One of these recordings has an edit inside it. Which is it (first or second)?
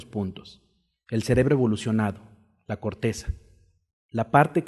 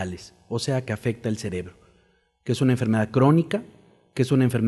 second